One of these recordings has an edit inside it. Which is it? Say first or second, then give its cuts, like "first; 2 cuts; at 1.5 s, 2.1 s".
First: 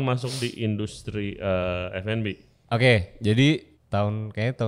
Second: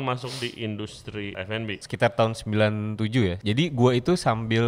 second; 2 cuts; at 1.5 s, 3.4 s